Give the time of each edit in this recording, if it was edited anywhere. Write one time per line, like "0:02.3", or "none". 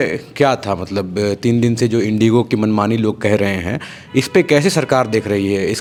none